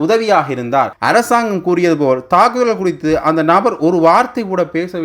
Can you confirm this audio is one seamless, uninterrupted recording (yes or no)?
no